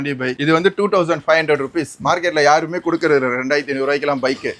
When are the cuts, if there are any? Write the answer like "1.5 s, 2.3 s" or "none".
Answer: none